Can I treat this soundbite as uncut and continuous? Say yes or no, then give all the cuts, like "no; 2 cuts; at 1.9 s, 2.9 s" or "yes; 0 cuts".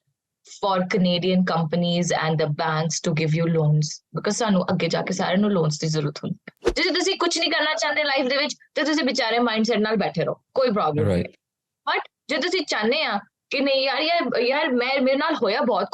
no; 1 cut; at 6.6 s